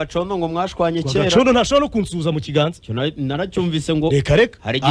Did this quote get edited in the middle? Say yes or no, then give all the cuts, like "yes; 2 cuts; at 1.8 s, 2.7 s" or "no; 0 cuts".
no; 0 cuts